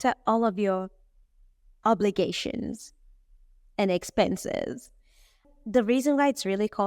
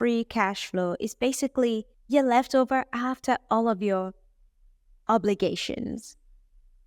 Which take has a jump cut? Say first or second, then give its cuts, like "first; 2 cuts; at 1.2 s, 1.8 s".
first; 1 cut; at 5.4 s